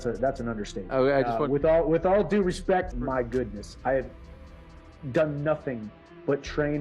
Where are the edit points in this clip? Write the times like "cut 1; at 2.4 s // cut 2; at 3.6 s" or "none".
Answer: cut 1; at 2.9 s